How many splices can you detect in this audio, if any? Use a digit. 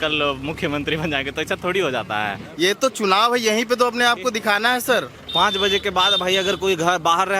2